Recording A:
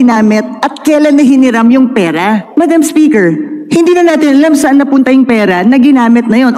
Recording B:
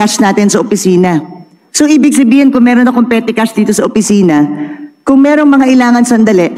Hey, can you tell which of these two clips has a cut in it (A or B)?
A